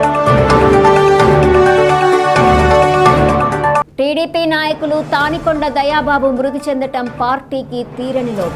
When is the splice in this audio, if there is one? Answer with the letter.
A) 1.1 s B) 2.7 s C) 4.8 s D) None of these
A